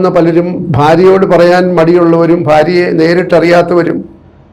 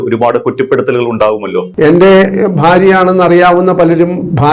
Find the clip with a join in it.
second; 1 cut; at 1.7 s

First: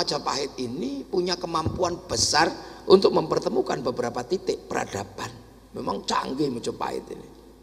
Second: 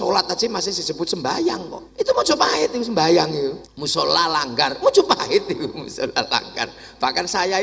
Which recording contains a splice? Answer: second; 2 cuts; at 1.8 s, 3.7 s

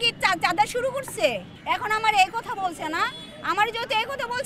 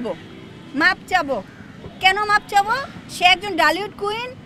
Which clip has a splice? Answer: first; 1 cut; at 1.5 s

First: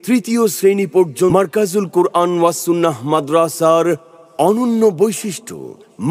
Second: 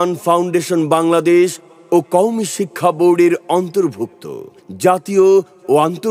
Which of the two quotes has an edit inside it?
first; 1 cut; at 1.3 s

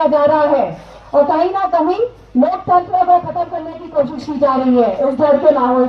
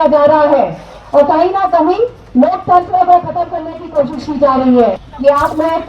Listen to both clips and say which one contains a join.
second; 1 cut; at 5.0 s

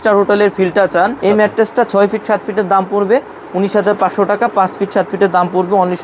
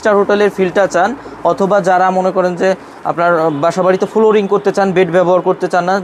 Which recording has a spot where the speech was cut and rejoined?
first; 1 cut; at 1.2 s

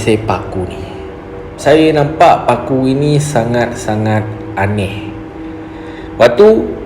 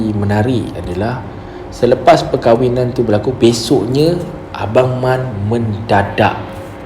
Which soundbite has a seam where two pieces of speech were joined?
first; 1 cut; at 1.6 s

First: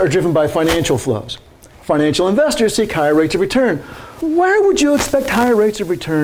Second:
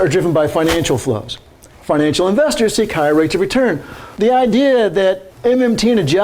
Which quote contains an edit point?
second; 2 cuts; at 4.0 s, 5.3 s

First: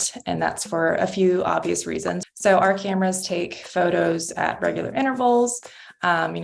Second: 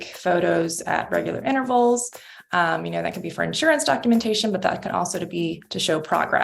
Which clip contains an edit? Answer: first; 1 cut; at 2.2 s

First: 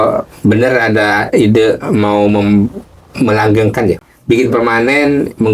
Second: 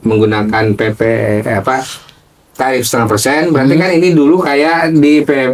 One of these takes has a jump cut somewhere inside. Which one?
first; 1 cut; at 4.0 s

